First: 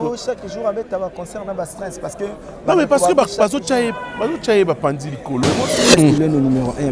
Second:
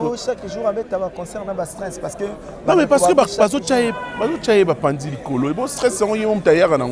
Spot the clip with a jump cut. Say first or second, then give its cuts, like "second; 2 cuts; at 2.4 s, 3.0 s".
first; 1 cut; at 5.8 s